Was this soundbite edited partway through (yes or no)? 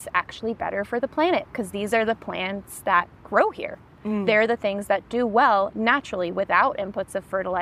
no